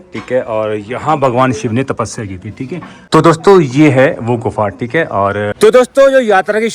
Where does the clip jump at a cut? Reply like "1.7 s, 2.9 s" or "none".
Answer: 2.9 s, 5.5 s